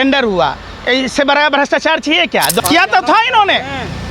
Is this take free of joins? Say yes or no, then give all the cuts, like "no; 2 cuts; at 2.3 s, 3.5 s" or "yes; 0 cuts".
no; 1 cut; at 2.6 s